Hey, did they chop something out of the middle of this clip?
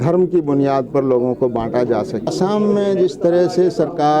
yes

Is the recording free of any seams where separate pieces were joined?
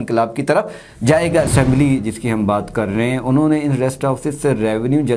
no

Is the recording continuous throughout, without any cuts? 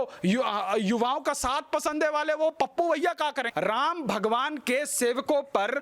no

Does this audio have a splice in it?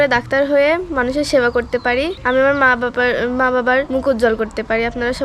yes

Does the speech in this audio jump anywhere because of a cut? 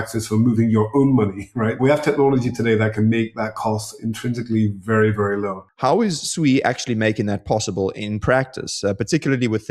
yes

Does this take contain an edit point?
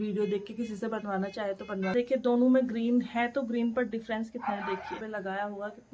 yes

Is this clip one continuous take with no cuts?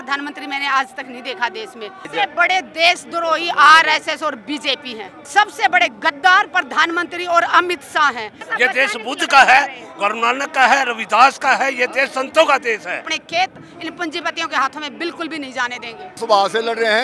no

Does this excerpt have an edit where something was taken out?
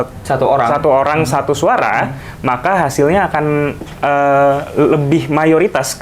no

